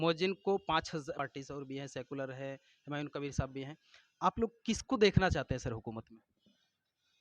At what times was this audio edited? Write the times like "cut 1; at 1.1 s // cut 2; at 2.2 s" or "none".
cut 1; at 1.2 s